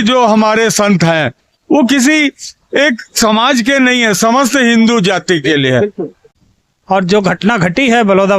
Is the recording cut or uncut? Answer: cut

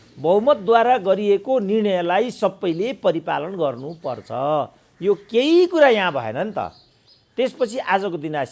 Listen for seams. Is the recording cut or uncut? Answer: uncut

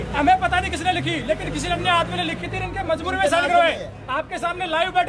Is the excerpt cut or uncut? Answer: uncut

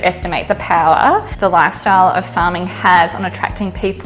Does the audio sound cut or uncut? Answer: cut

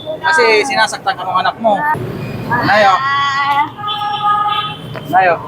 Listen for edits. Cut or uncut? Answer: cut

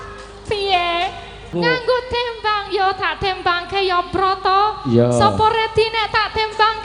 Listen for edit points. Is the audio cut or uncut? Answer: cut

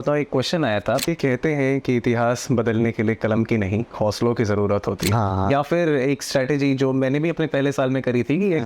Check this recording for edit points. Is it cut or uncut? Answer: cut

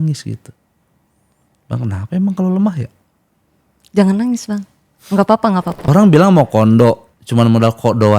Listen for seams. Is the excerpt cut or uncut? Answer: cut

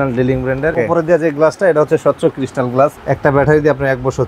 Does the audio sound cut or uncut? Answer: cut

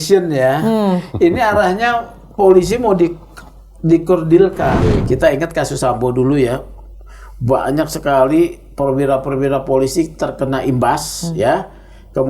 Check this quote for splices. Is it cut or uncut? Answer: cut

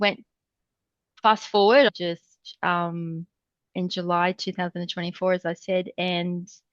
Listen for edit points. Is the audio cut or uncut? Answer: cut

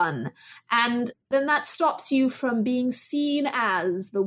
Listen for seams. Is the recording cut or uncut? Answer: uncut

